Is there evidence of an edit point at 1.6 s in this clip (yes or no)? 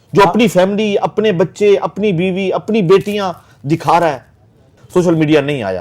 no